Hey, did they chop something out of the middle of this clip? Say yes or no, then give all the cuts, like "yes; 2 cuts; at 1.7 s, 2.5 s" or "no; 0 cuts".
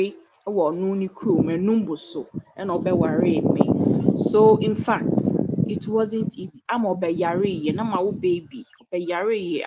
no; 0 cuts